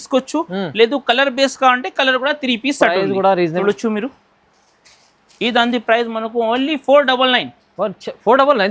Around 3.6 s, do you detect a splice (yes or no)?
yes